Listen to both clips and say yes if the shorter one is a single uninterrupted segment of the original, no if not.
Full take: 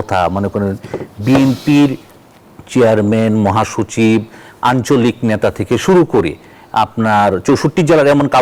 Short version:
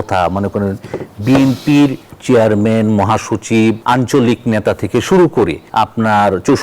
no